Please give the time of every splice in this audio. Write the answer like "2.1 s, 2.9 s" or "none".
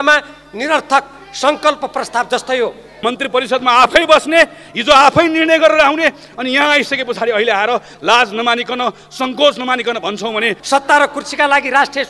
2.9 s, 10.6 s

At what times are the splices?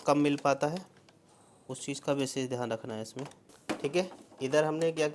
3.5 s

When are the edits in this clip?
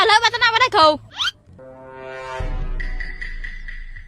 1.1 s

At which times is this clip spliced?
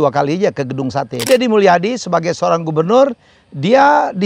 1.3 s

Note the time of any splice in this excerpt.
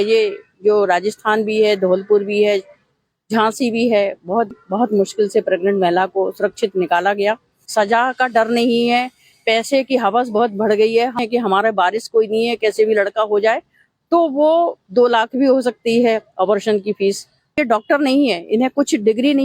4.5 s, 7.6 s, 11.2 s, 17.6 s

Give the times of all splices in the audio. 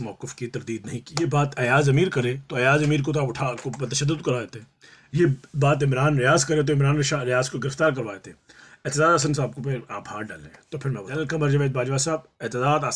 1.0 s, 11.1 s

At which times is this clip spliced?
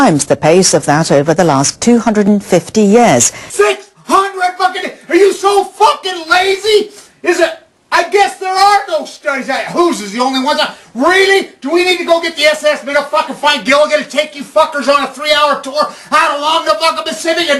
7.0 s

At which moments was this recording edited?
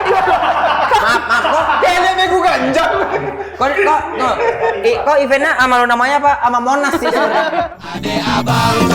7.9 s

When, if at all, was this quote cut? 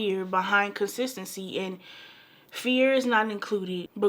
none

